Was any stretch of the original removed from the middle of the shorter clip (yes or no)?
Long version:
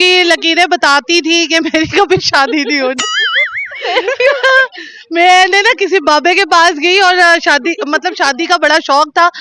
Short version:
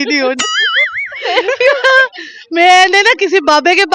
no